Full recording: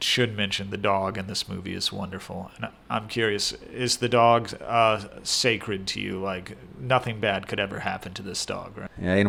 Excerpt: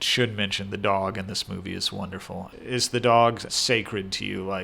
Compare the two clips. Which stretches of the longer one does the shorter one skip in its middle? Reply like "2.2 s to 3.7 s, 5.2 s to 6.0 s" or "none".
2.5 s to 3.6 s, 4.6 s to 5.2 s